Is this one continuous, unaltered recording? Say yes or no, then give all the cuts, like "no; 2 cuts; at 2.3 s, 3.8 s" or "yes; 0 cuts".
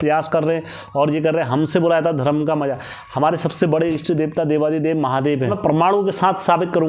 no; 1 cut; at 5.5 s